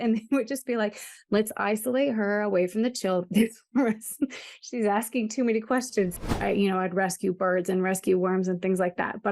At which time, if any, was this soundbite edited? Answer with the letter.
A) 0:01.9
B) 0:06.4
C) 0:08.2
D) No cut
B